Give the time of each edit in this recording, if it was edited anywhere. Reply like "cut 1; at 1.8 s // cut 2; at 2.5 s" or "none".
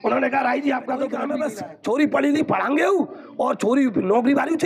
cut 1; at 1.2 s